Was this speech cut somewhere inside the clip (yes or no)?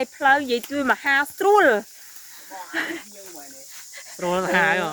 no